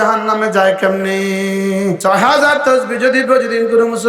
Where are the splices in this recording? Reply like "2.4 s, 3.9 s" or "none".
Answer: 2.0 s